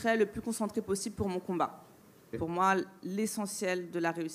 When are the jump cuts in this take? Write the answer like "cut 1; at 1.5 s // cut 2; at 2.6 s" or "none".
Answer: cut 1; at 2.4 s